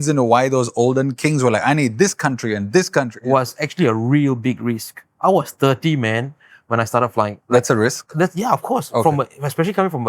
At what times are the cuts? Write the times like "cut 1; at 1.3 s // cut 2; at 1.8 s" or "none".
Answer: cut 1; at 3.2 s // cut 2; at 7.4 s